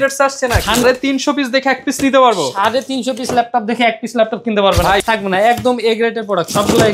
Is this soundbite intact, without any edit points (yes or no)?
no